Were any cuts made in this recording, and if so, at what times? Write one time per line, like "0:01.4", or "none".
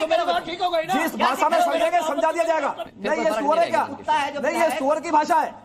0:02.9